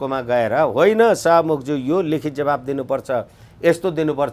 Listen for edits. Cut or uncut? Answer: uncut